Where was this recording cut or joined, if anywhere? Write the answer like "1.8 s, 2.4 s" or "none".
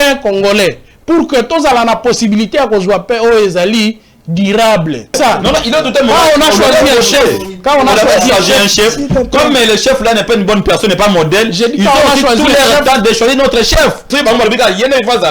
5.1 s, 14.1 s